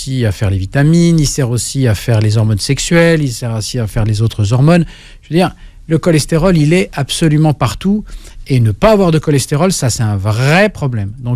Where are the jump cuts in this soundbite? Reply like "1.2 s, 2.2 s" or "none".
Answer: none